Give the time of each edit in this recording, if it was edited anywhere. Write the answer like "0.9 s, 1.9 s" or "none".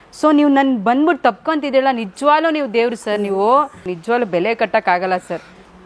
3.9 s